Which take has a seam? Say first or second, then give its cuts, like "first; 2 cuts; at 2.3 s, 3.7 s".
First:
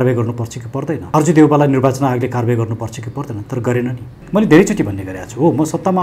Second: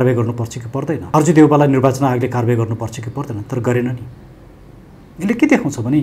first; 1 cut; at 4.1 s